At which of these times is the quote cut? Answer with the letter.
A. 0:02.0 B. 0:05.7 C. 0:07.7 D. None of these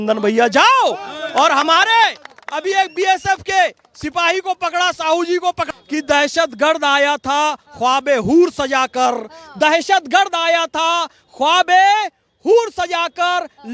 B